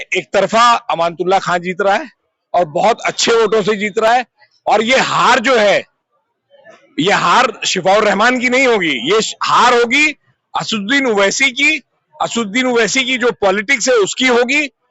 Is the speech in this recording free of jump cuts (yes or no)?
yes